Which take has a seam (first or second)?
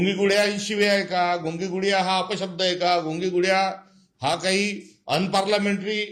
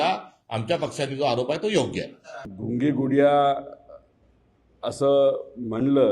second